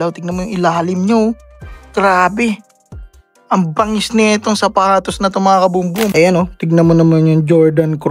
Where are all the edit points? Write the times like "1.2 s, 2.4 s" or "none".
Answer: 6.1 s